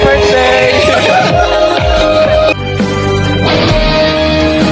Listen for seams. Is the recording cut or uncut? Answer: cut